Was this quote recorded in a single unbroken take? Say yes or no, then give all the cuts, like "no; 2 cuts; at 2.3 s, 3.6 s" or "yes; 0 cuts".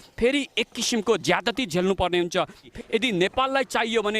no; 1 cut; at 2.7 s